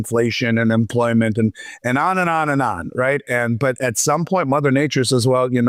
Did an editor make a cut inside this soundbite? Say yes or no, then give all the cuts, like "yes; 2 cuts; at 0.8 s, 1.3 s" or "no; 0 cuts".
no; 0 cuts